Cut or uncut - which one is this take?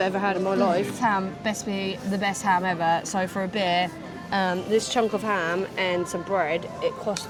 uncut